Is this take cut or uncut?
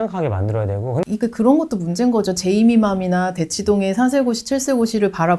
cut